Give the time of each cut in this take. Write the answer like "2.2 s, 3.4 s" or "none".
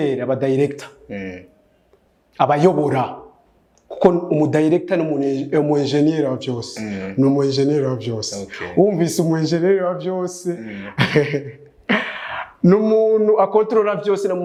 none